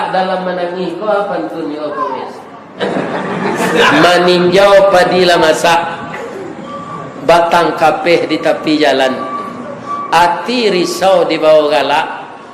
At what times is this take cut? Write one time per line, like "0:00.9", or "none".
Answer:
0:02.8